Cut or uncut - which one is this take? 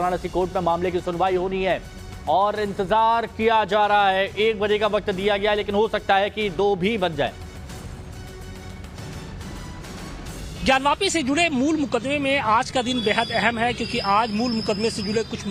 uncut